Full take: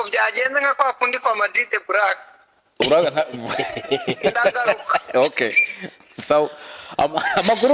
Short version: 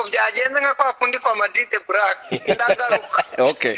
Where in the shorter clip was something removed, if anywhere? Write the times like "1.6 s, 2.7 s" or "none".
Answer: 2.3 s